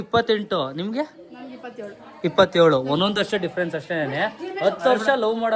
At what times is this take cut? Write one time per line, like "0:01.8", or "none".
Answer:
none